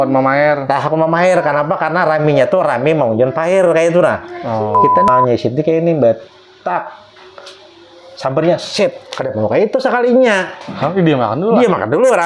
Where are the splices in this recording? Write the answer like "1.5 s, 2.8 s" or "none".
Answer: 5.1 s